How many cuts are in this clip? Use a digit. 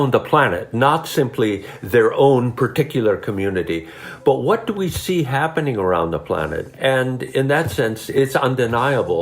2